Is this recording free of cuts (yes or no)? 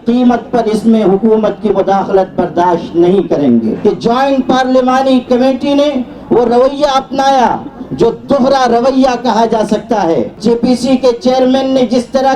no